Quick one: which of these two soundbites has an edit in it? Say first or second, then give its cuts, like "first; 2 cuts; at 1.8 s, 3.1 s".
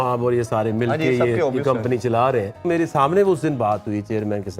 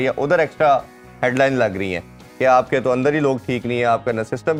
first; 1 cut; at 2.7 s